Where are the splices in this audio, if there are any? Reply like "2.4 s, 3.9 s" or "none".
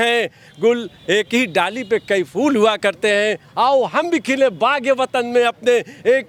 none